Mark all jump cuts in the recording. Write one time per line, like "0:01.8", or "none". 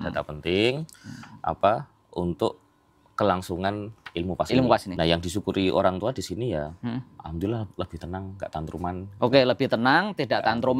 0:04.9